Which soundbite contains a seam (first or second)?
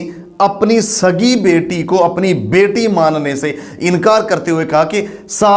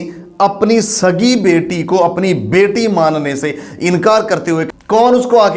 second